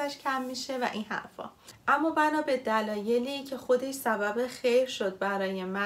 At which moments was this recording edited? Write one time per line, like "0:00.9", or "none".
0:01.8